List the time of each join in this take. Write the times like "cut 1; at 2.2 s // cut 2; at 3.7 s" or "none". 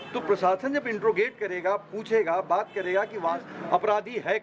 cut 1; at 3.5 s